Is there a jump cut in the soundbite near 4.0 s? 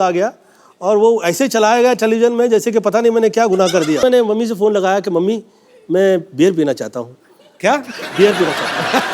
yes; 1 cut; at 4.0 s

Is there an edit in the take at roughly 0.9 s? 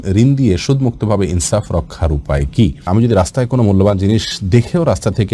no; 1 cut; at 2.8 s

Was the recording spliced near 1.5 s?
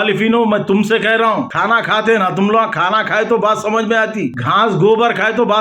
yes; 2 cuts; at 1.5 s, 4.4 s

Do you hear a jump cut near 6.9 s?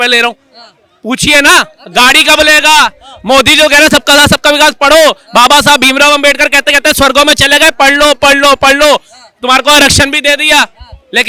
no; 0 cuts

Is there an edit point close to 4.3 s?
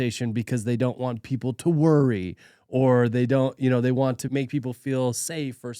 yes; 1 cut; at 4.3 s

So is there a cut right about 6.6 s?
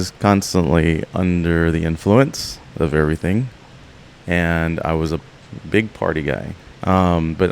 yes; 1 cut; at 6.6 s

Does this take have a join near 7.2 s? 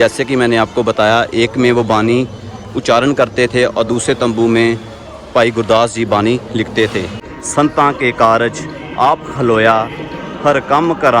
yes; 1 cut; at 7.2 s

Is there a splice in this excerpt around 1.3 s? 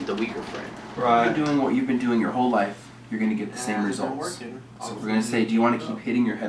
yes; 1 cut; at 1.3 s

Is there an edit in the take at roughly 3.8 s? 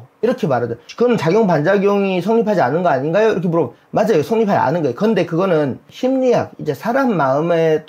no; 2 cuts; at 0.8 s, 5.9 s

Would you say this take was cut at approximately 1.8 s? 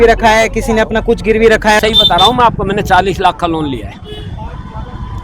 yes; 1 cut; at 1.8 s

